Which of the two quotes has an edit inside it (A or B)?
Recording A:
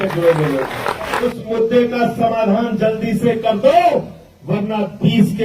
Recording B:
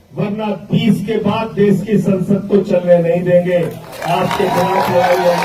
A